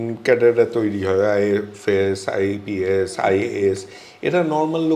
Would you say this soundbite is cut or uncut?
uncut